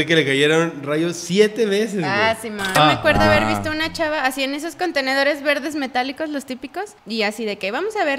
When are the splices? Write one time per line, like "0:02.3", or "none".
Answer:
0:02.7
0:07.0